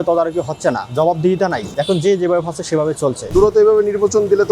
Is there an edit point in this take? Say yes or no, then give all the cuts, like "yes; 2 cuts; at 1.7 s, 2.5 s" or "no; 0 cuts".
yes; 2 cuts; at 1.7 s, 3.3 s